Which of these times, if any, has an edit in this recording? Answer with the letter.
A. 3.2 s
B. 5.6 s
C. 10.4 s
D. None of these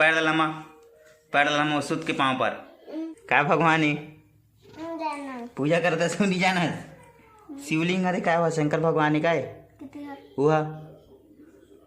A